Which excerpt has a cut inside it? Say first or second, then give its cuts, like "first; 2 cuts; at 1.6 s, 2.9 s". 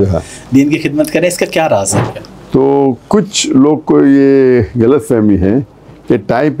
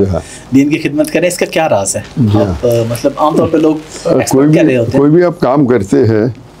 first; 1 cut; at 2.0 s